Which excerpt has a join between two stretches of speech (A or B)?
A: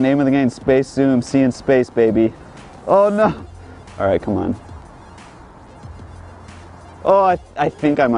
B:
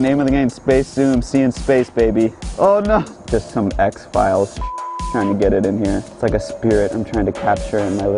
B